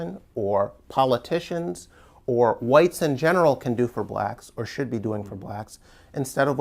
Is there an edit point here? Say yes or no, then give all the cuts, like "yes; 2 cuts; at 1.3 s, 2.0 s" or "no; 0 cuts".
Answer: no; 0 cuts